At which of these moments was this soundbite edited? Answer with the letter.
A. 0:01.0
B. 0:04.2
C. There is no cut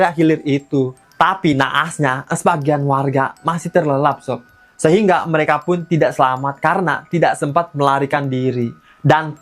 A